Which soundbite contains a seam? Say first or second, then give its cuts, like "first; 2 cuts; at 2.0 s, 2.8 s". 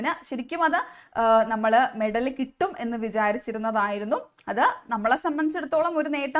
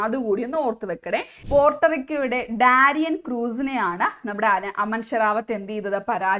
second; 1 cut; at 1.3 s